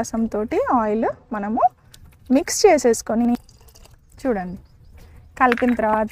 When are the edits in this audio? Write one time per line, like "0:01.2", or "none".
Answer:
0:03.3